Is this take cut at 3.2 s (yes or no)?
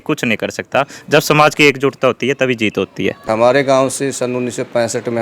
yes